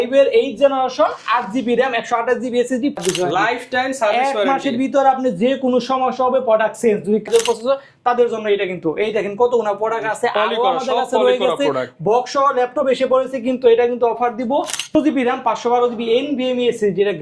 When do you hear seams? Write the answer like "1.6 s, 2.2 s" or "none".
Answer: 3.0 s, 7.3 s, 14.9 s